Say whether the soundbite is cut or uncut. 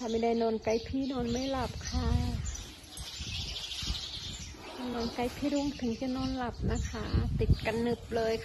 cut